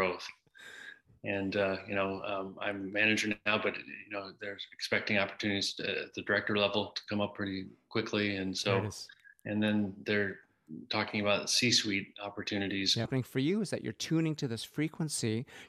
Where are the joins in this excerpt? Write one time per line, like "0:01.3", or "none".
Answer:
0:13.1